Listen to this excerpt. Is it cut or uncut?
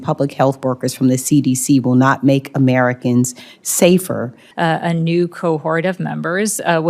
cut